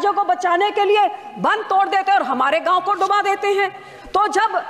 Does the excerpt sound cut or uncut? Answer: uncut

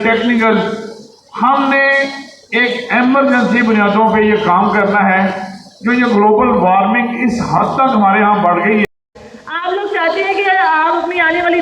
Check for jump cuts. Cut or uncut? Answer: cut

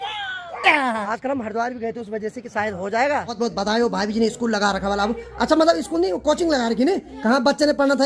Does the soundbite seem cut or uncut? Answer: cut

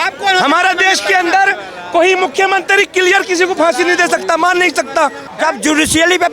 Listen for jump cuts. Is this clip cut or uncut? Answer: cut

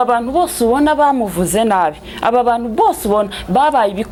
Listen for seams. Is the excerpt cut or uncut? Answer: uncut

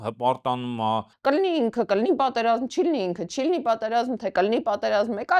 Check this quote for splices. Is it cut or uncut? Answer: cut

